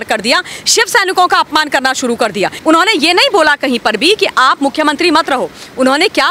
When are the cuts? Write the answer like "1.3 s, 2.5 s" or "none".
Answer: 2.6 s